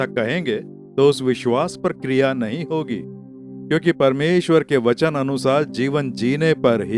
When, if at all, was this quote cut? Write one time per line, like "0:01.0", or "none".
none